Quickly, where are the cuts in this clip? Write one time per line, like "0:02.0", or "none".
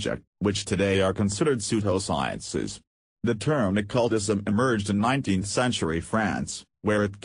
0:03.1